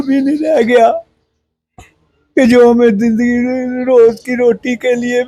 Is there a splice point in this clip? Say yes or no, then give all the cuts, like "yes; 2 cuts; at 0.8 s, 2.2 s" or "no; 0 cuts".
no; 0 cuts